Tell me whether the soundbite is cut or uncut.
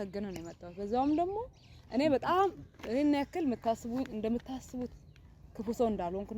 uncut